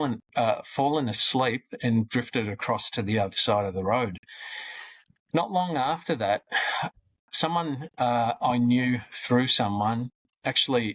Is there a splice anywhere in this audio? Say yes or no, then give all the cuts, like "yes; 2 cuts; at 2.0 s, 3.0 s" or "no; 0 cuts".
no; 0 cuts